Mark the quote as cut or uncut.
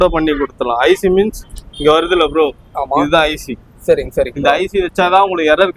uncut